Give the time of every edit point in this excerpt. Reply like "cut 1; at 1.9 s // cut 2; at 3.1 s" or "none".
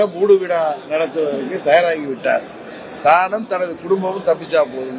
none